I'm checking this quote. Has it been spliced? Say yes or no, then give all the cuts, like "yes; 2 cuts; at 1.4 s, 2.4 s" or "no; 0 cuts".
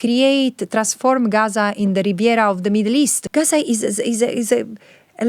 yes; 1 cut; at 3.2 s